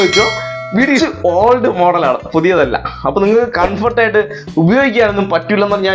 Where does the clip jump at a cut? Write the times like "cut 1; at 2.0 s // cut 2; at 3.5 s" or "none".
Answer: cut 1; at 1.0 s